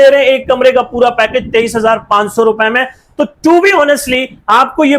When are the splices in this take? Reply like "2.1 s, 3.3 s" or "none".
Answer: none